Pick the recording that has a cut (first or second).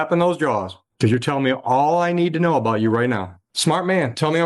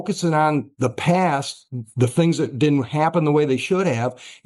first